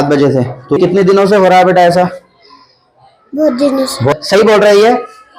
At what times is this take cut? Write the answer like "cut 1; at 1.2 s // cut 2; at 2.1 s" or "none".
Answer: cut 1; at 0.8 s // cut 2; at 4.1 s